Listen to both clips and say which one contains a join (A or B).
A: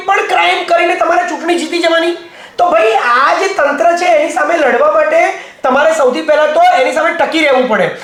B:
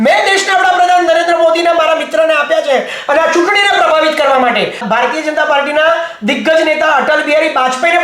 B